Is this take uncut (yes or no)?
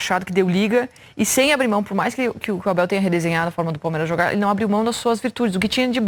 yes